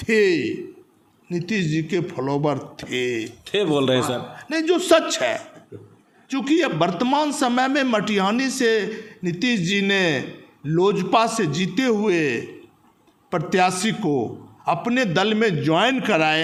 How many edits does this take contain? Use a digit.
0